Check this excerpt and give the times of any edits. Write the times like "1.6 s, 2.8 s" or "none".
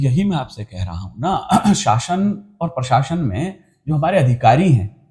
none